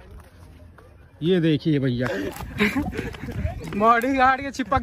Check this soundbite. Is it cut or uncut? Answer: cut